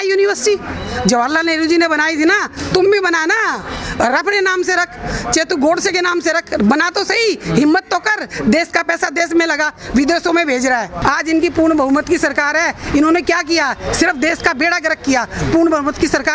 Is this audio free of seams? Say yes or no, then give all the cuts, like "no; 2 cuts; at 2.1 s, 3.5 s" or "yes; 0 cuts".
no; 1 cut; at 11.0 s